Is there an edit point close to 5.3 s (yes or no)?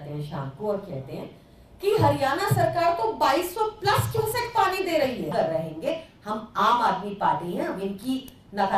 yes